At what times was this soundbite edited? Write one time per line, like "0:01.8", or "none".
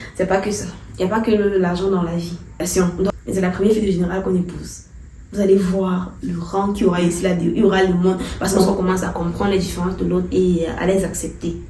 0:02.7
0:08.7